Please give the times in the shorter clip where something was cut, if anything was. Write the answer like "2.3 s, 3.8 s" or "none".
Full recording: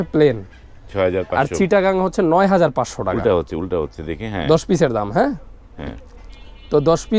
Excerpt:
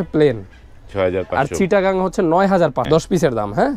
2.9 s